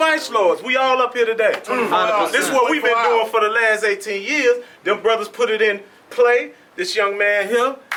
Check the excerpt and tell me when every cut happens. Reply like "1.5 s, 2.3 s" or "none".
none